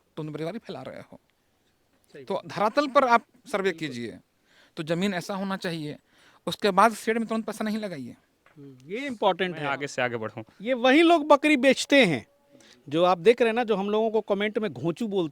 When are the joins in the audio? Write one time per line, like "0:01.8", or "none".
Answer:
0:09.8